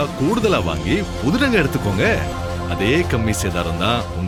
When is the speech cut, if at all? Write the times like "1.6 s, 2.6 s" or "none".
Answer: none

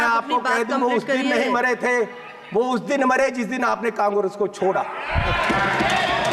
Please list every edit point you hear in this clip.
none

